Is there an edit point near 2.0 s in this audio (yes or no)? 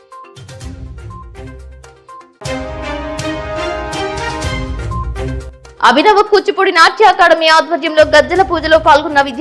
yes